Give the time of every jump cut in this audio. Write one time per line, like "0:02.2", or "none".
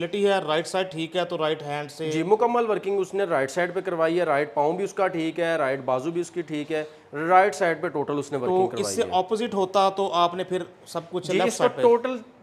none